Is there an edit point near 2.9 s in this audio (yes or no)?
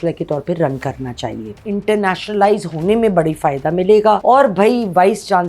no